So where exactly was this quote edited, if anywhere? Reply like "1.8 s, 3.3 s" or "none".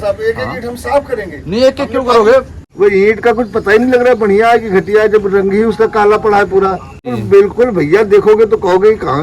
2.6 s, 7.1 s